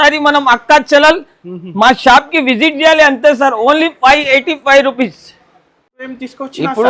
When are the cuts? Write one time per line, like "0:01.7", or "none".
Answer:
none